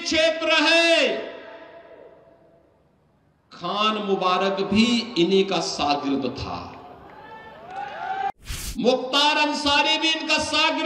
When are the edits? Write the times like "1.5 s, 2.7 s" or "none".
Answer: 8.3 s